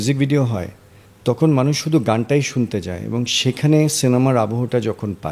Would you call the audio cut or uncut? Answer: uncut